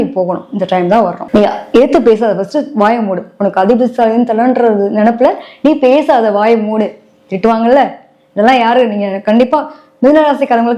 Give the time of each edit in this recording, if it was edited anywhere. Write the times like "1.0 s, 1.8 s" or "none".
none